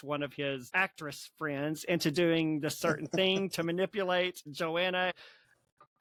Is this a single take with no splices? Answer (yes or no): yes